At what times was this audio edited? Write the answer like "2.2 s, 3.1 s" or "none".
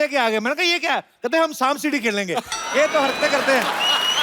none